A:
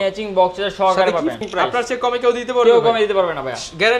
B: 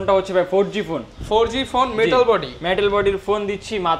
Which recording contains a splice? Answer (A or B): A